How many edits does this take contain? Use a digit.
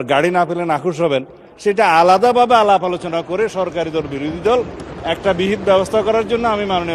1